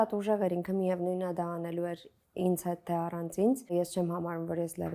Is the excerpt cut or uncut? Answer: cut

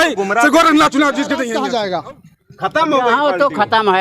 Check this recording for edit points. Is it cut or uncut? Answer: cut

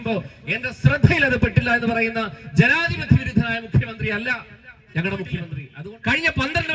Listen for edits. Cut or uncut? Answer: cut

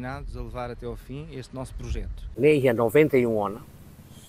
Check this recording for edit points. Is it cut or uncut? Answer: cut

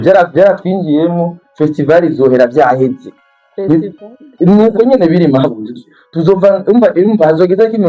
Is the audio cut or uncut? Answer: uncut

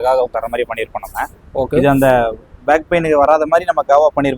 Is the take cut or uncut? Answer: uncut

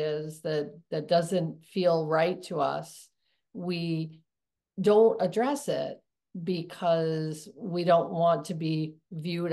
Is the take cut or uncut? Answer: uncut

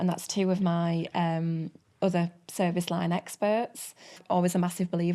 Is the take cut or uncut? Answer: cut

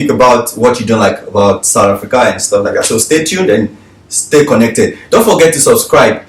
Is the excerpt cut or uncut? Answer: uncut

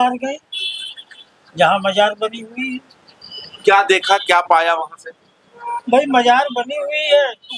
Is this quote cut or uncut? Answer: uncut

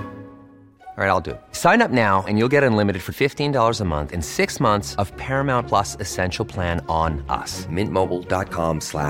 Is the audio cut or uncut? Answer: uncut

